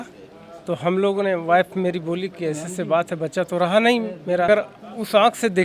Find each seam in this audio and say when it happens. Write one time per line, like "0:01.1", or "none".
0:04.5